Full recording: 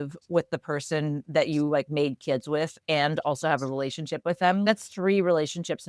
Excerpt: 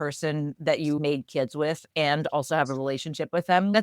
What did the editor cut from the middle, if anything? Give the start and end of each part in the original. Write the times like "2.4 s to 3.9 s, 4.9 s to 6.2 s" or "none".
1.7 s to 1.9 s